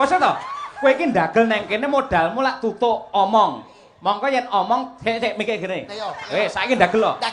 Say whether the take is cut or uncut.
uncut